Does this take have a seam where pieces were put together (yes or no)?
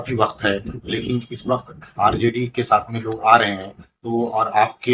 no